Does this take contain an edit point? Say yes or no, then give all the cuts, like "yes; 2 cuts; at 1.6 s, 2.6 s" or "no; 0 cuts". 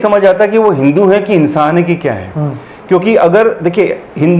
no; 0 cuts